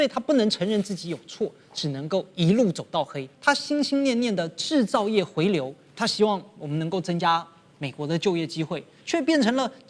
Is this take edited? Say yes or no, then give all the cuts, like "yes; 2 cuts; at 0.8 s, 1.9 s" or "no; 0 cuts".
yes; 1 cut; at 3.3 s